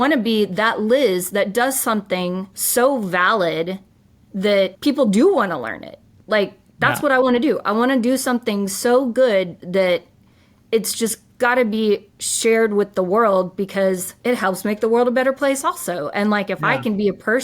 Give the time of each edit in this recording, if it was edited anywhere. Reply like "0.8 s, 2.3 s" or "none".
2.5 s, 4.8 s, 14.1 s